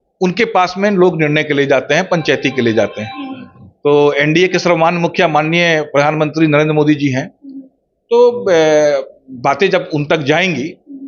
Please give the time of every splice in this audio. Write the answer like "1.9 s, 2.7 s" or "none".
none